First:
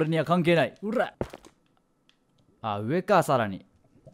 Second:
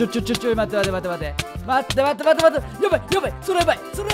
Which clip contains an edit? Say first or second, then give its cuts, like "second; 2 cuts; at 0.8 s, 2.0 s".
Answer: first; 1 cut; at 1.1 s